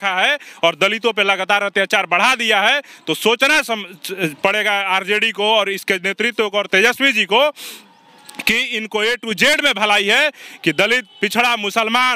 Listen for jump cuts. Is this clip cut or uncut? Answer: uncut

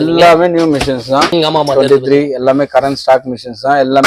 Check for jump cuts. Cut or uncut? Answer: cut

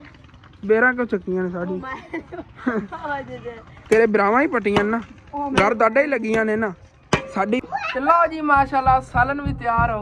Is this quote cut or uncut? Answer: cut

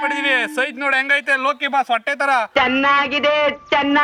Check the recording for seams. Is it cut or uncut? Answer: uncut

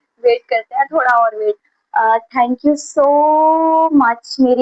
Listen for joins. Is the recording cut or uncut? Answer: cut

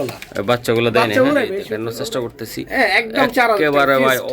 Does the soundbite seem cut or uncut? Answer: cut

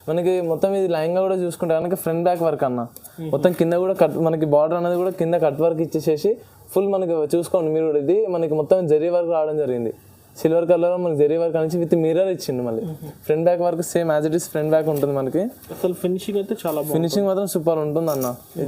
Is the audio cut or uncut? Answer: uncut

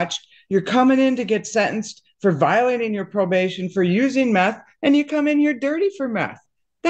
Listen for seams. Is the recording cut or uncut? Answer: uncut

